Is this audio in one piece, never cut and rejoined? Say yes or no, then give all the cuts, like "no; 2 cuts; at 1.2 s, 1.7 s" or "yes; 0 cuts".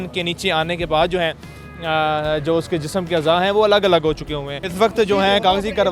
no; 1 cut; at 4.6 s